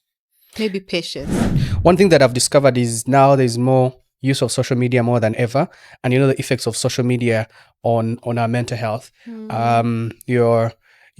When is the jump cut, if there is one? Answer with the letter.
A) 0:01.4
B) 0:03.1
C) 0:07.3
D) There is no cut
A